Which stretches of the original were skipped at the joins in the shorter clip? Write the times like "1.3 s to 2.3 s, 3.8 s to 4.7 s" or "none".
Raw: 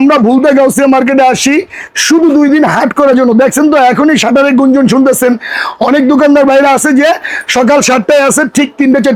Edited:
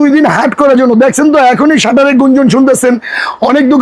none